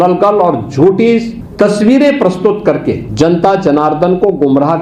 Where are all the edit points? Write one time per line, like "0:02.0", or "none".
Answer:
0:01.4
0:03.1